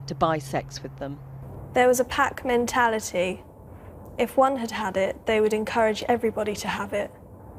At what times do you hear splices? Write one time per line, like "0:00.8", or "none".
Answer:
0:06.7